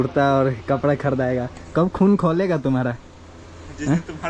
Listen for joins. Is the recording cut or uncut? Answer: uncut